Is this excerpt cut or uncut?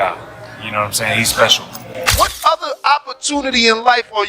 cut